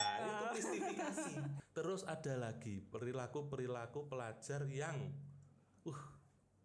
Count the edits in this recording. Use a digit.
1